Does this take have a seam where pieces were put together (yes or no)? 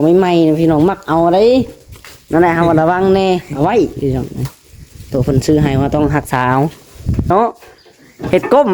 yes